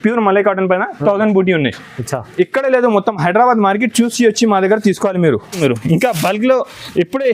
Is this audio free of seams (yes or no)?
no